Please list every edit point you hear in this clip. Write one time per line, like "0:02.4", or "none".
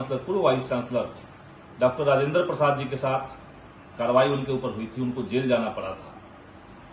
none